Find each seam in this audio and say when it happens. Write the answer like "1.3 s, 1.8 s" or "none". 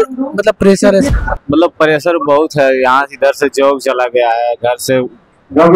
1.1 s